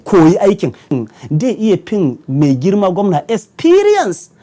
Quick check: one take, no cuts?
no; 1 cut; at 1.0 s

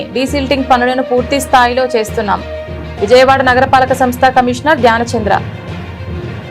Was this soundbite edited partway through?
yes; 1 cut; at 5.4 s

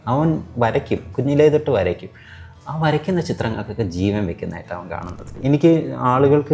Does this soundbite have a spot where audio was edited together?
yes; 1 cut; at 5.3 s

